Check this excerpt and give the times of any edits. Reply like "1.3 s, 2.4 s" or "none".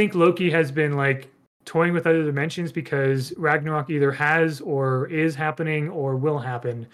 none

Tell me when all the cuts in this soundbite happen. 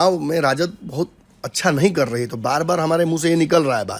none

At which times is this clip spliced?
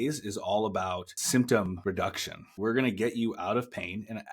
1.1 s, 2.2 s

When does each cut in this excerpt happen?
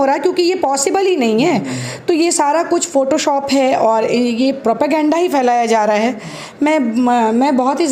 none

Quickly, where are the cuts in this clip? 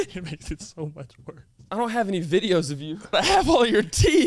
1.7 s, 3.1 s

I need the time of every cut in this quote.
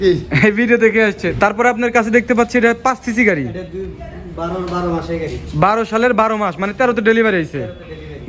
1.3 s

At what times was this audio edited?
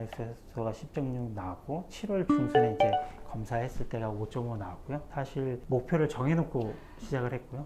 none

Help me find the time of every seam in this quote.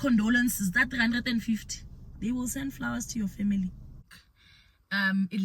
4.0 s

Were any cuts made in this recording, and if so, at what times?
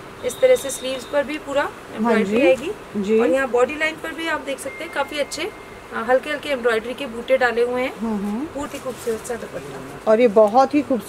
8.7 s

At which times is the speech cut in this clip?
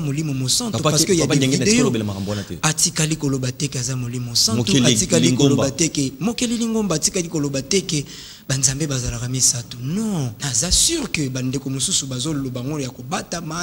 10.4 s

